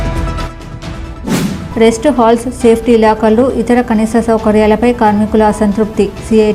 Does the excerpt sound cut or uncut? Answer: cut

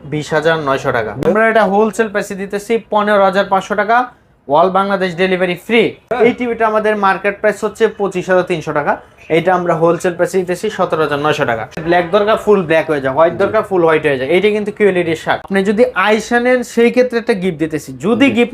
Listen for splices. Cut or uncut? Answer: cut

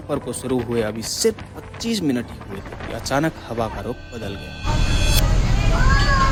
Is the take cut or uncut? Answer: uncut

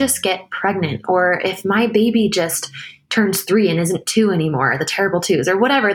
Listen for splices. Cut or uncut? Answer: uncut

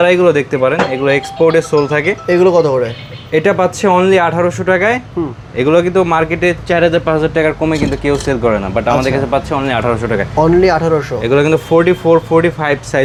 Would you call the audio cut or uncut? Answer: uncut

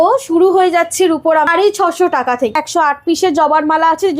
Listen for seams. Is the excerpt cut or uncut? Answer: cut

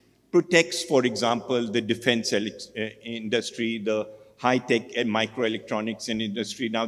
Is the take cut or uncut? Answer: uncut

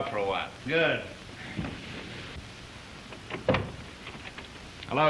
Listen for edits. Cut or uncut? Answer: cut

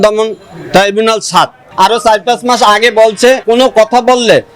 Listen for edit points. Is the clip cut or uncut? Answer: cut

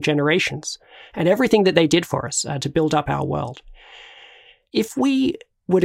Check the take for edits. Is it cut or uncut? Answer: cut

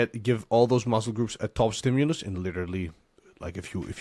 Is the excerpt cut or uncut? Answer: uncut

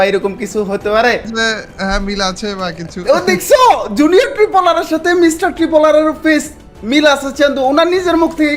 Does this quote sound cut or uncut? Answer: cut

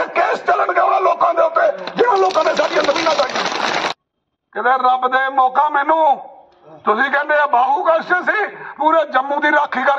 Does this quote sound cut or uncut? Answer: cut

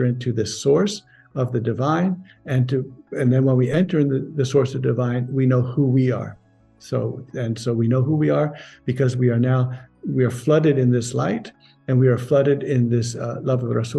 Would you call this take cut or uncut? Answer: uncut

